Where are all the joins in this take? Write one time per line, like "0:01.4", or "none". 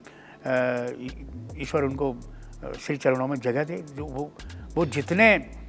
none